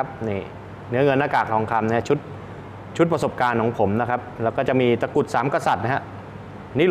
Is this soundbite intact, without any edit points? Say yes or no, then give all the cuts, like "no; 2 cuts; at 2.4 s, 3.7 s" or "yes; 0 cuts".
yes; 0 cuts